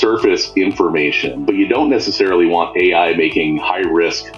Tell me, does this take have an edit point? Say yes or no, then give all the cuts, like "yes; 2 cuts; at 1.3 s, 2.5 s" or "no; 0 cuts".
yes; 1 cut; at 1.3 s